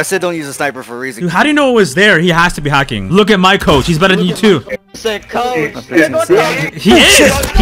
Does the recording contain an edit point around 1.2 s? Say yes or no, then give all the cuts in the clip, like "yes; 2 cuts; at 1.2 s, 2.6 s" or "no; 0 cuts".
yes; 2 cuts; at 1.2 s, 3.0 s